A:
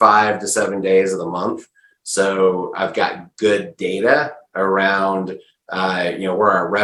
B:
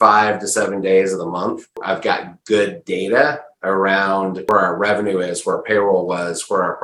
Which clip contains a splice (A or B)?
B